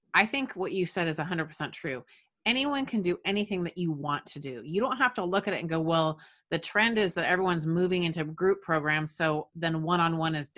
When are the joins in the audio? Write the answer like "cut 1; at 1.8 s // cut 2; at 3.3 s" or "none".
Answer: none